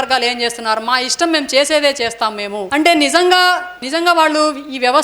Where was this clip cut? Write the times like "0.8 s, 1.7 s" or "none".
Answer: 2.6 s, 3.8 s